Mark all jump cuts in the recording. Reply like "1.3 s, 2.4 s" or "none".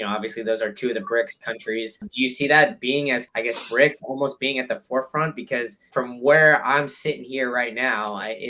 2.1 s, 3.3 s, 5.9 s